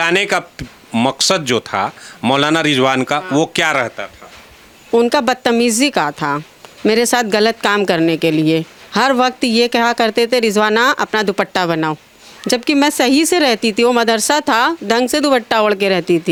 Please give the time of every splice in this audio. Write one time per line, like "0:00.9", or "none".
none

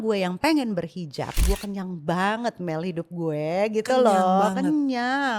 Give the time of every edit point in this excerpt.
0:01.4

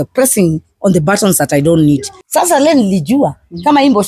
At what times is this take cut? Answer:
0:02.1

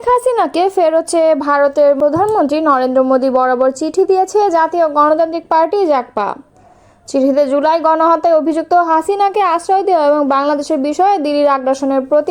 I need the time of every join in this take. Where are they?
0:02.0

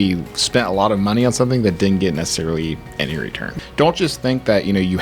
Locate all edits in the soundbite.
0:03.5

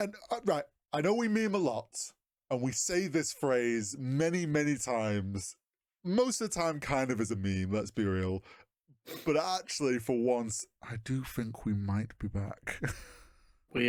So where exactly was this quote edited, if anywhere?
none

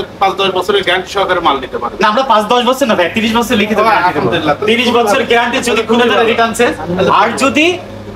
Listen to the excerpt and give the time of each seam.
none

